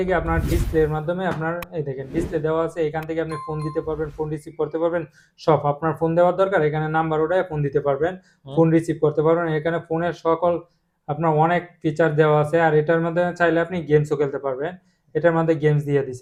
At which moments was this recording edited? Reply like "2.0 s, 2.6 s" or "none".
none